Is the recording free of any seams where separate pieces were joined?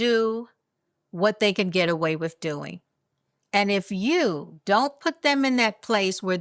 yes; 0 cuts

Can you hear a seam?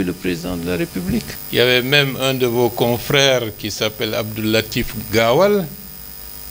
yes; 1 cut; at 1.4 s

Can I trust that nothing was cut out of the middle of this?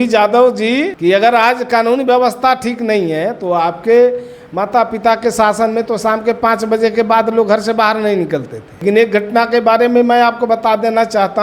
no; 2 cuts; at 0.9 s, 8.8 s

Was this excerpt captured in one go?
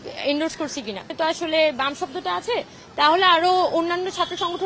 no; 1 cut; at 1.1 s

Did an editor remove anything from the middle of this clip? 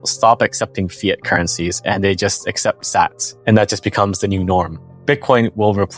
yes; 2 cuts; at 3.3 s, 4.8 s

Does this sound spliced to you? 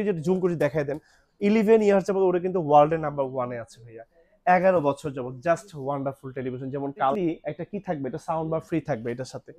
yes; 1 cut; at 7.1 s

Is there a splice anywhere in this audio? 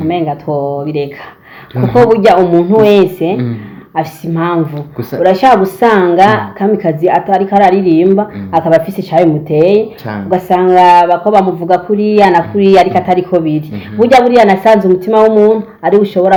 no; 0 cuts

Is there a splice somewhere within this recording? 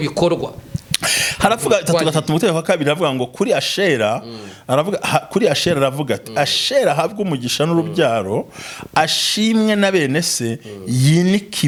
no; 0 cuts

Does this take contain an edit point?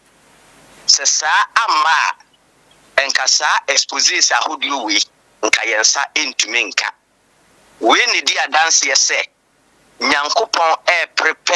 no; 0 cuts

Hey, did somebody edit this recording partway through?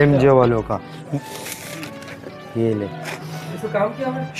yes; 2 cuts; at 1.0 s, 3.1 s

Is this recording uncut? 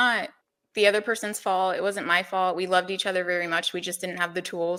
yes; 0 cuts

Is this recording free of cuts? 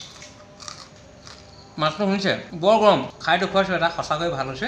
no; 2 cuts; at 2.5 s, 3.1 s

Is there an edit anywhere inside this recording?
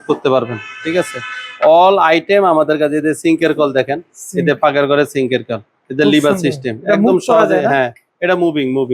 no; 0 cuts

